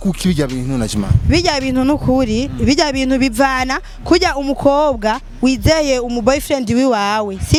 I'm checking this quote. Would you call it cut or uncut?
uncut